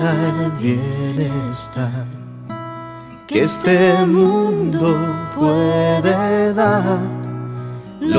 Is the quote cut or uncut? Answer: cut